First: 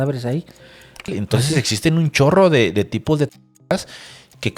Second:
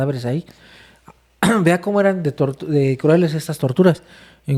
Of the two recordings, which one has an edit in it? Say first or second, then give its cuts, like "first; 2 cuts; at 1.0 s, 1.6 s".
first; 1 cut; at 1.1 s